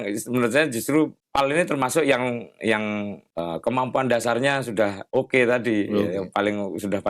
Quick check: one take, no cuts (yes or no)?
no